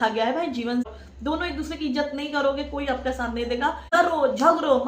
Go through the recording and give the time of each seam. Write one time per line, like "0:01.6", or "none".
0:00.9
0:03.9